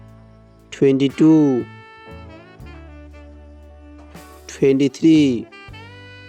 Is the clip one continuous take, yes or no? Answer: yes